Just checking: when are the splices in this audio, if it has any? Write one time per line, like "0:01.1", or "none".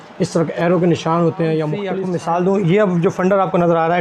0:01.9